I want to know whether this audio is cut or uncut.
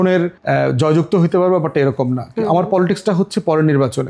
uncut